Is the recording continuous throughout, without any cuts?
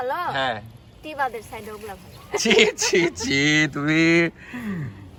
yes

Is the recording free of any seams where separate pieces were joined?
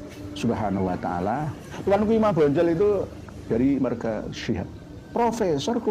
no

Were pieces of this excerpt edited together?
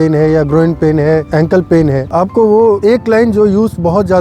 yes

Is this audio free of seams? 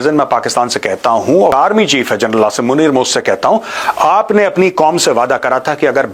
no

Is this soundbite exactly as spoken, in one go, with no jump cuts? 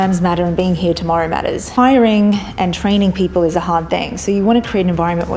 no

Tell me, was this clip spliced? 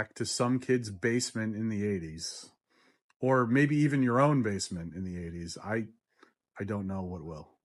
no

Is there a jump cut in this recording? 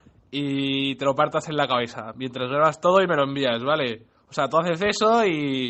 no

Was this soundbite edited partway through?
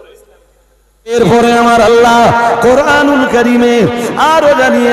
yes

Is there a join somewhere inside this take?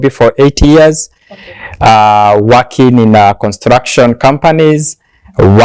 no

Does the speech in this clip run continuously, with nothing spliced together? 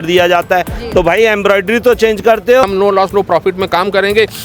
no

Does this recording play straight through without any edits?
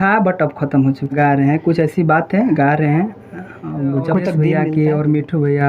no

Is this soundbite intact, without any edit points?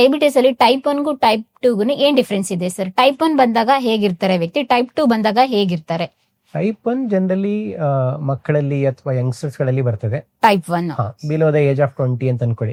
yes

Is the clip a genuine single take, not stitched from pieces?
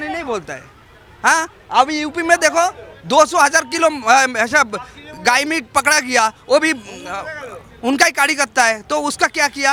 yes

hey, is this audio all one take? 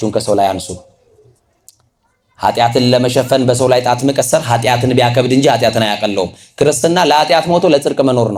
yes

